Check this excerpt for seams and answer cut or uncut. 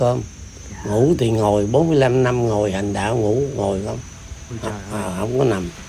uncut